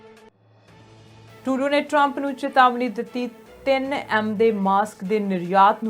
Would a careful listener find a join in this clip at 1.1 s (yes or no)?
yes